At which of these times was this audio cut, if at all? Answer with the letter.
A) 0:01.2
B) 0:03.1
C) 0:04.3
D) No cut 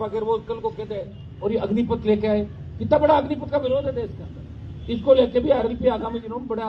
A